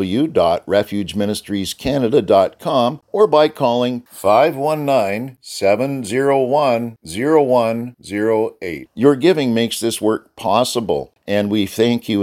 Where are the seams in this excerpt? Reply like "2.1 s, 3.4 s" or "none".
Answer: 3.0 s, 11.1 s